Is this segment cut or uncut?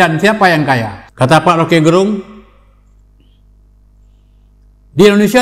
cut